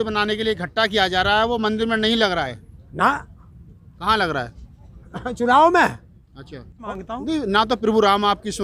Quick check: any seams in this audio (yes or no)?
yes